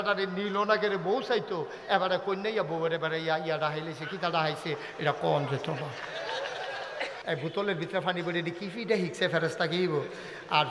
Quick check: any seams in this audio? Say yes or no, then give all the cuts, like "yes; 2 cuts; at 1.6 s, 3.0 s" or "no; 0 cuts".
yes; 1 cut; at 7.2 s